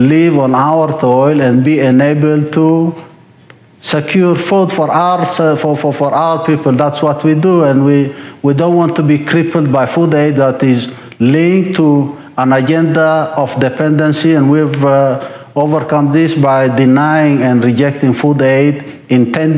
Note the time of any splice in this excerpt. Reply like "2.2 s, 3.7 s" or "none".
none